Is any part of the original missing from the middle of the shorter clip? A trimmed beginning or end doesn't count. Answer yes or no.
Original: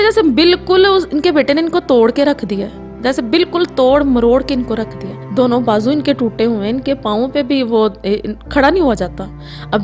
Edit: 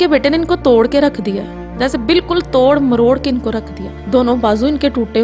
no